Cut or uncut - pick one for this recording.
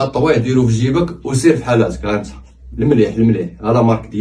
uncut